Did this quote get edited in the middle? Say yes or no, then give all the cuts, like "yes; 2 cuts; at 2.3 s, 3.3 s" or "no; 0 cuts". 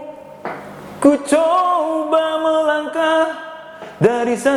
no; 0 cuts